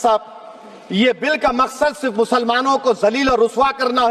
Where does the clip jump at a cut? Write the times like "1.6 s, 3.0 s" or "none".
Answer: none